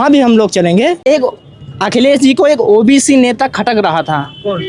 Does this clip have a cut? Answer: yes; 1 cut; at 1.1 s

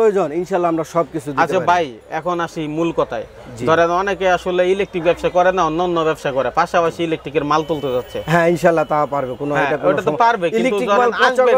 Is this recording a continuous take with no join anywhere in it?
yes; 0 cuts

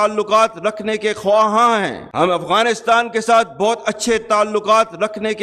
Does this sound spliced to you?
yes; 1 cut; at 2.0 s

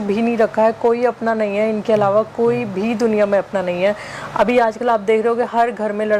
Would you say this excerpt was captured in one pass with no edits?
yes; 0 cuts

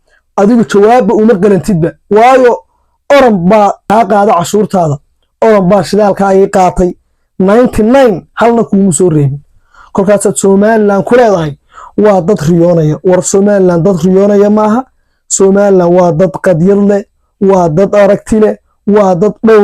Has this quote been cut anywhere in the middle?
yes; 1 cut; at 3.8 s

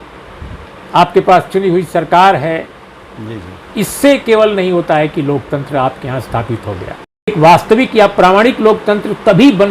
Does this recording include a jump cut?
yes; 1 cut; at 7.3 s

